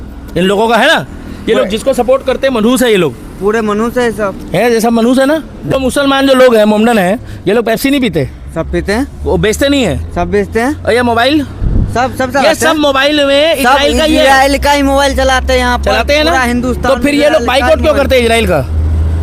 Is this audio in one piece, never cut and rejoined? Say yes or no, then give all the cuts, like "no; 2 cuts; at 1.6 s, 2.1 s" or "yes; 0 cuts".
no; 1 cut; at 5.7 s